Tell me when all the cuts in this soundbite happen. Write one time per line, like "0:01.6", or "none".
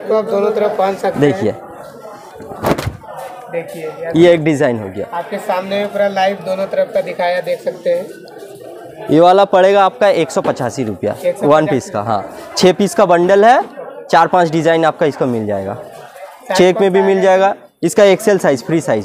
none